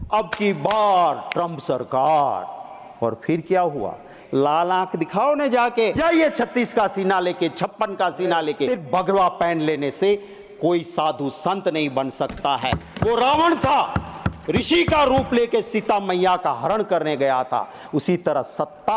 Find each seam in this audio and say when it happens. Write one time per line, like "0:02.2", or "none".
0:04.1
0:05.9
0:08.7